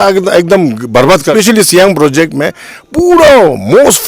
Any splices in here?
yes; 1 cut; at 1.3 s

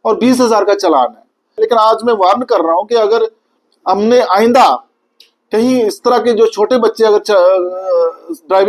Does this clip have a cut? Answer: yes; 1 cut; at 1.6 s

